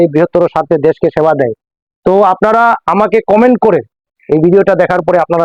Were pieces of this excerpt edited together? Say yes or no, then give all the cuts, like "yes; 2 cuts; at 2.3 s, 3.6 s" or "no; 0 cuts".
no; 0 cuts